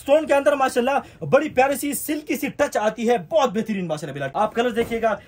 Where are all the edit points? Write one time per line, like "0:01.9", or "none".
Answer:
0:04.2